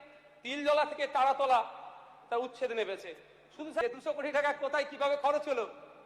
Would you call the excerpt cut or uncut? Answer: cut